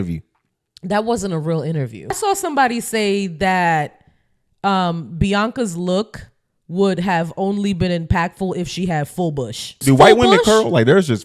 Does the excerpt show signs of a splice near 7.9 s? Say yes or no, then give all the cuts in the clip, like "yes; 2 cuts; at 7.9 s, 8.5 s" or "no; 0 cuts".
no; 2 cuts; at 2.2 s, 9.8 s